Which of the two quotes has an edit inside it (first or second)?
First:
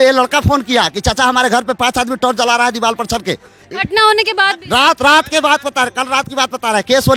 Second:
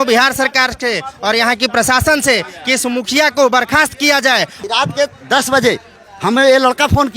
second